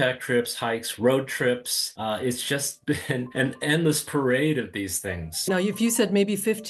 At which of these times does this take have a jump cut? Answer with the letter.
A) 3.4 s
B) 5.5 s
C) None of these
B